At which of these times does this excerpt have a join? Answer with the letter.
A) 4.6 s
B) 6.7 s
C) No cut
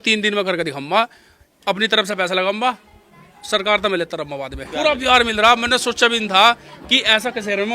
A